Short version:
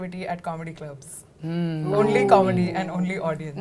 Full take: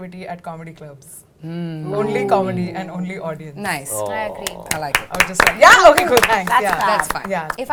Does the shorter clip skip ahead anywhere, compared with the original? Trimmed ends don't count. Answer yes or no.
no